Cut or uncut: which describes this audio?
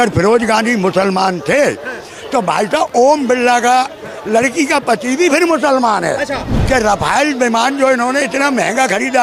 cut